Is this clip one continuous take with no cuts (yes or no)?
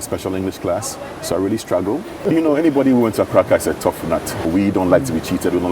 no